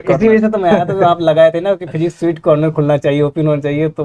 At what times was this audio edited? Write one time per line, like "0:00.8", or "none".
none